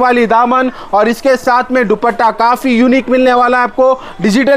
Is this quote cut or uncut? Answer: uncut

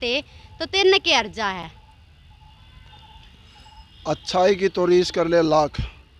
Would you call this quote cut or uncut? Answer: uncut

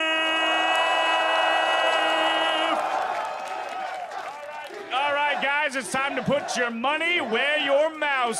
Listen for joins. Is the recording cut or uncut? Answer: uncut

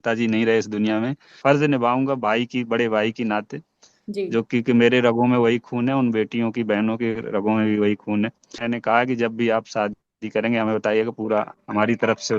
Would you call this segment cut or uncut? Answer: cut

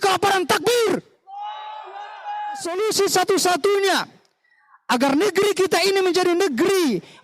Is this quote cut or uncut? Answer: cut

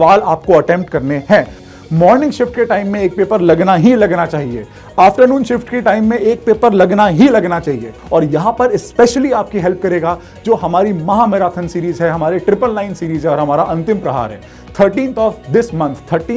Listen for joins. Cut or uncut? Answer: cut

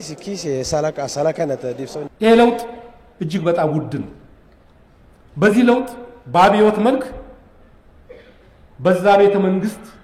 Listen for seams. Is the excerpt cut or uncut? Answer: cut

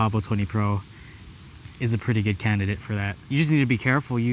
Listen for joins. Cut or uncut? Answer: cut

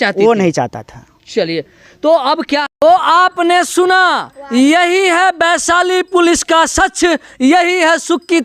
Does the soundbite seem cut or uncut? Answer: cut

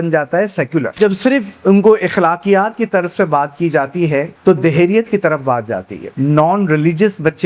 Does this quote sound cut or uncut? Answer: cut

